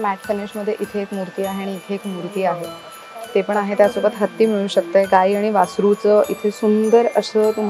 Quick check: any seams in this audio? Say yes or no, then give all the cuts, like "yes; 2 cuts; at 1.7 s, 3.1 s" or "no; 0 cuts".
no; 0 cuts